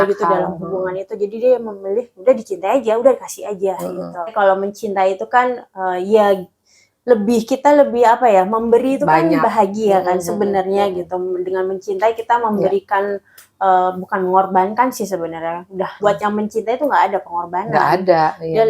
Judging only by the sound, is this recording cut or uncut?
cut